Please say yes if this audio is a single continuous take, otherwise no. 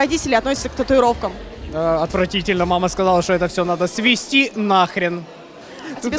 yes